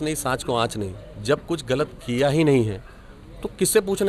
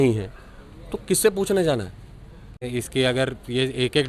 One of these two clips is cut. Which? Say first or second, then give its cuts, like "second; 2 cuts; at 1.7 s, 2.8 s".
second; 1 cut; at 2.7 s